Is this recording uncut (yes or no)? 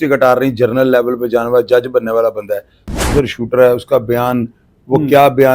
no